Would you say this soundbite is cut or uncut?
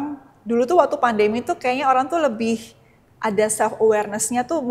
uncut